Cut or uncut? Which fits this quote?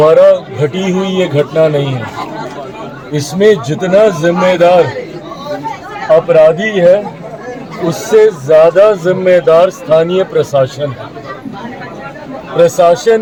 uncut